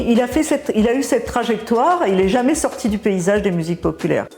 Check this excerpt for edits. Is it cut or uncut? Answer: uncut